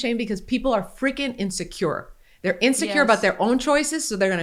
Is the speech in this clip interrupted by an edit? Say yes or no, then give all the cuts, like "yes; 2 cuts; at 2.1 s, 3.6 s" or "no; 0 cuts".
no; 0 cuts